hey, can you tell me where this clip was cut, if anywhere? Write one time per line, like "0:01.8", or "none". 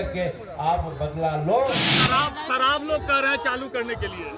0:01.9